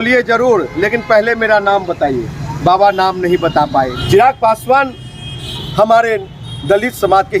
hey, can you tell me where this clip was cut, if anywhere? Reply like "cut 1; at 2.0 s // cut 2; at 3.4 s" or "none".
cut 1; at 4.0 s